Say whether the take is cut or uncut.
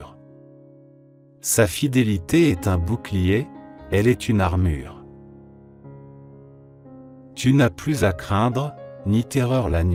uncut